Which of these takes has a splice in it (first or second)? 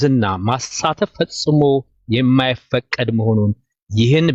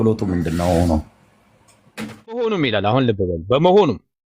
second